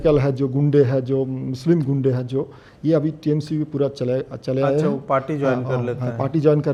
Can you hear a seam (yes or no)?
no